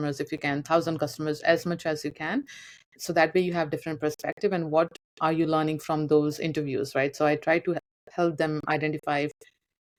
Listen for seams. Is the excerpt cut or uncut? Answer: uncut